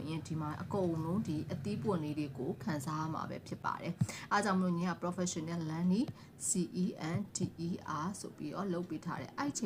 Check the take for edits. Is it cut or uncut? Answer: uncut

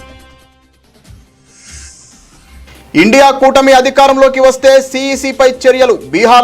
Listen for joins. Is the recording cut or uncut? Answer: cut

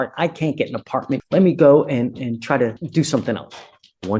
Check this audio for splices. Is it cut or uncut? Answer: cut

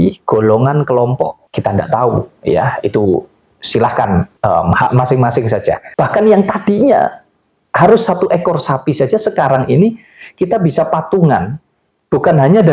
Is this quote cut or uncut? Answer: cut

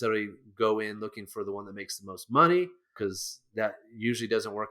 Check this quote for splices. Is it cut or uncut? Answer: cut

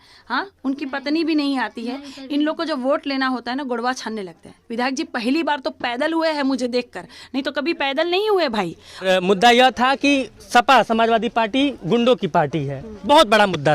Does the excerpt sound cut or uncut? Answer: cut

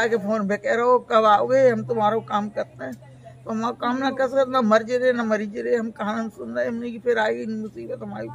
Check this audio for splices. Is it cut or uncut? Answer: uncut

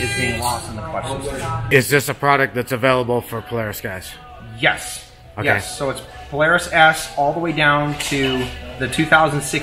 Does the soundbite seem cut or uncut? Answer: cut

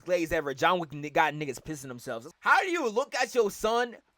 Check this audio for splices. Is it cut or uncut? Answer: cut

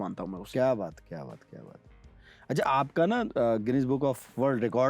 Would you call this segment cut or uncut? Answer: uncut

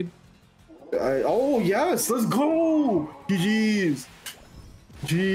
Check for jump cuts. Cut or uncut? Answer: uncut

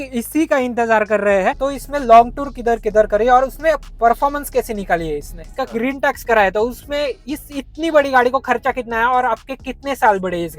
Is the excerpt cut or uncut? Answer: cut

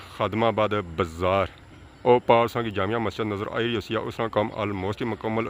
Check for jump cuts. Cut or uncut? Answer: uncut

